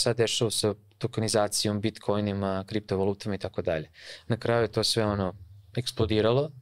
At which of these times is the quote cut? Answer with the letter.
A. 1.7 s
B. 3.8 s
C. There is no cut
C